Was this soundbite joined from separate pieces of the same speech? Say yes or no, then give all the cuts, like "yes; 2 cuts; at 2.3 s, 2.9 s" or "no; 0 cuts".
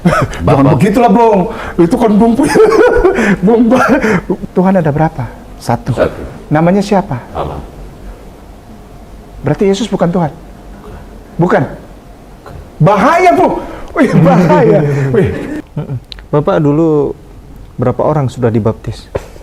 yes; 2 cuts; at 4.4 s, 15.5 s